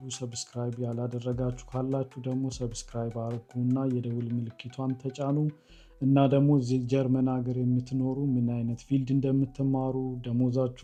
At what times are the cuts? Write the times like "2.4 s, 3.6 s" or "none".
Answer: none